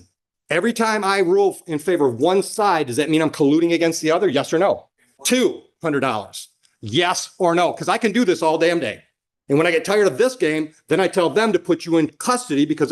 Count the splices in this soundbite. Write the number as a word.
zero